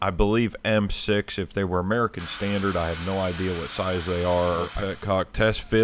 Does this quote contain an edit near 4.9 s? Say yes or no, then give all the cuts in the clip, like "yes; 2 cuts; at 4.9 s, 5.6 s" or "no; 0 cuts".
yes; 1 cut; at 4.9 s